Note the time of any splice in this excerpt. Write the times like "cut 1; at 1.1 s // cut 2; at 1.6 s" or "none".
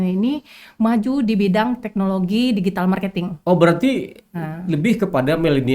none

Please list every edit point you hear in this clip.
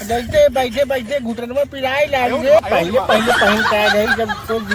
cut 1; at 2.6 s

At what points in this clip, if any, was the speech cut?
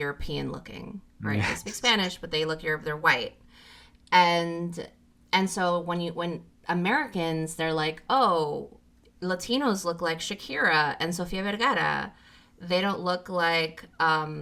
none

